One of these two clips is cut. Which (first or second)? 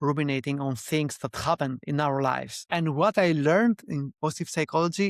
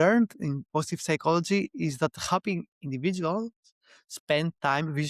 first